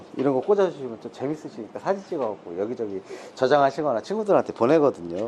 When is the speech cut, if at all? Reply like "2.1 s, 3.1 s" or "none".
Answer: none